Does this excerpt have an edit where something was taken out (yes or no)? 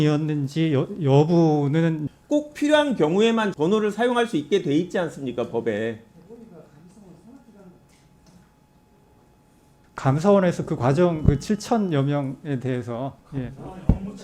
no